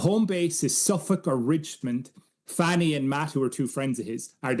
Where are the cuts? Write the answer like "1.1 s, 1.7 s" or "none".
1.8 s